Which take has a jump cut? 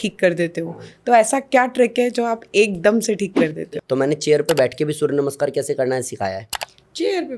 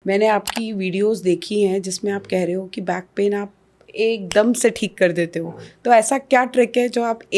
first; 1 cut; at 3.6 s

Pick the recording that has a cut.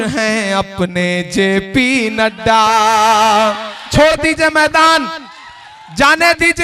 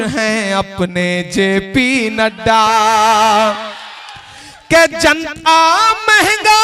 first; 1 cut; at 3.9 s

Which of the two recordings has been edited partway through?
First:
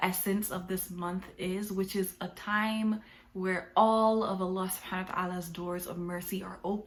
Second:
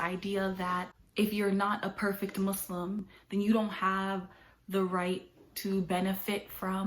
second; 2 cuts; at 1.0 s, 3.1 s

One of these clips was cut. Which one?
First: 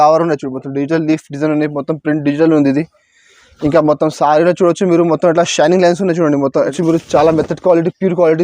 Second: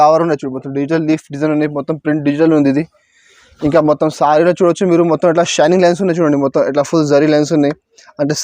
first; 1 cut; at 6.7 s

